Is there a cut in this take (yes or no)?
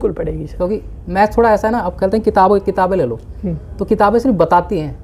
no